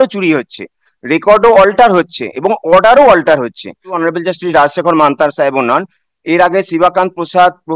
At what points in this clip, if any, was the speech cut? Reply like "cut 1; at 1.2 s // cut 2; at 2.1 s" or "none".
cut 1; at 4.0 s